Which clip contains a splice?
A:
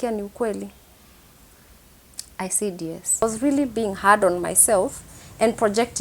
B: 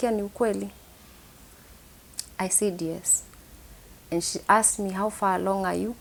A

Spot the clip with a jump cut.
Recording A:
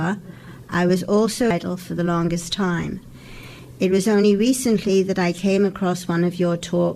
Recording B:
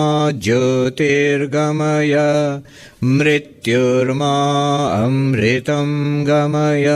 A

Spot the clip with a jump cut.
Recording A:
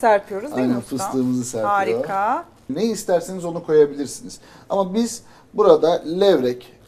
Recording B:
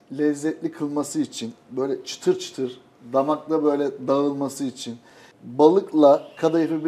A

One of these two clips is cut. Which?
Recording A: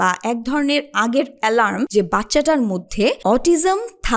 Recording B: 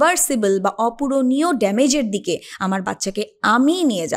A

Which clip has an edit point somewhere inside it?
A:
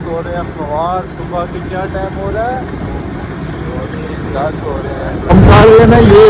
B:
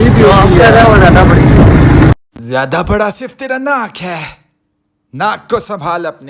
A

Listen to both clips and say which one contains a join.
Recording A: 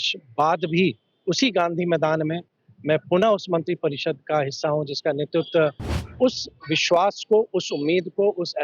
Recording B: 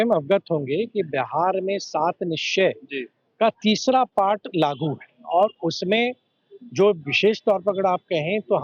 A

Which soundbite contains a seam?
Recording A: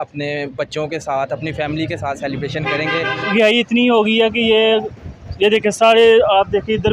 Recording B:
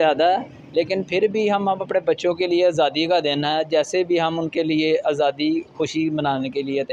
A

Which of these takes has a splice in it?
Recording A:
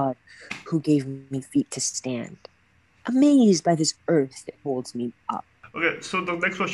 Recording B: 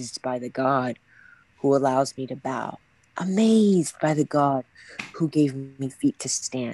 A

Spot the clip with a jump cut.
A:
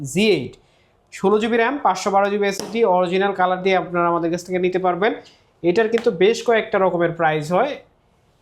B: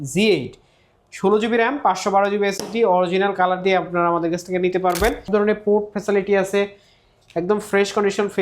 B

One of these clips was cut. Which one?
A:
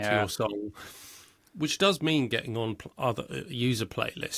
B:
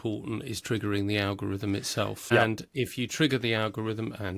B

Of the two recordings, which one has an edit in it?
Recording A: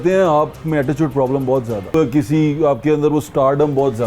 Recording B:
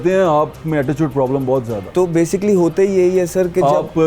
A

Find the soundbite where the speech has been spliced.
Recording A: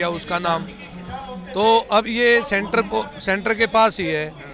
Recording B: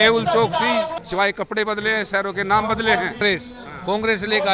B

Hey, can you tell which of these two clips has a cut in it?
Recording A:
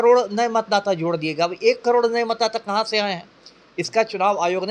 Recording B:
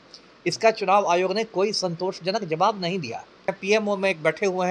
B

